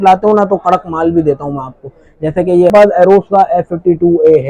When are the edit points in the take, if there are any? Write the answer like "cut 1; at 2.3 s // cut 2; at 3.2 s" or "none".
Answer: cut 1; at 2.7 s